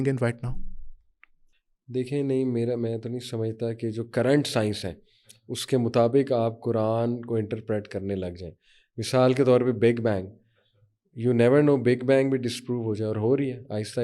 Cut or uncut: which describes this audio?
uncut